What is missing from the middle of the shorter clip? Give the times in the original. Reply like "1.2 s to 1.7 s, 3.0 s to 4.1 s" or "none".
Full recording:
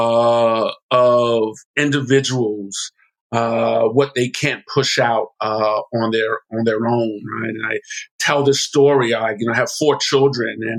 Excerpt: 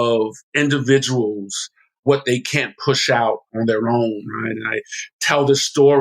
3.3 s to 3.9 s, 5.3 s to 6.4 s